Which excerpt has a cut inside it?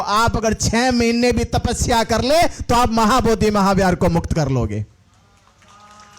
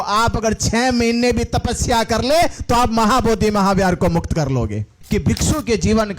second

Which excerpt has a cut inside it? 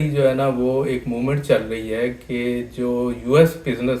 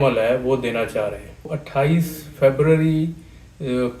second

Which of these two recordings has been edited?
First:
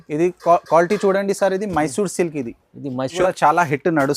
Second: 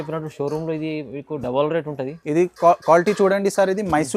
first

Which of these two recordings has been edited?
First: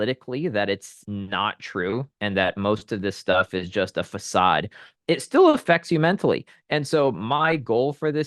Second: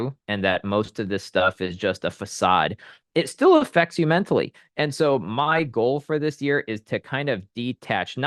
first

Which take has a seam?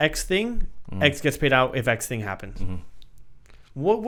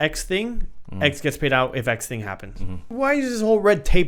second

